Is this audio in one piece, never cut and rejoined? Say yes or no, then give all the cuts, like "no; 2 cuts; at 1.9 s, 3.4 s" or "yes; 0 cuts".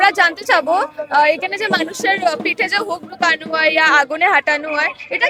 yes; 0 cuts